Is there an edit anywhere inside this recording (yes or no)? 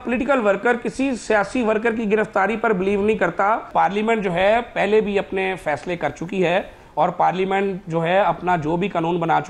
yes